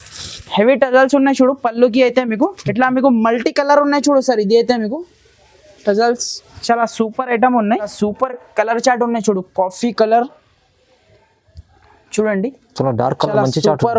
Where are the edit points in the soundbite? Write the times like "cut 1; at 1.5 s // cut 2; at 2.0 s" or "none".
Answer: cut 1; at 7.9 s